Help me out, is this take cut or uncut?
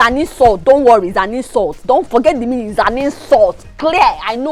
uncut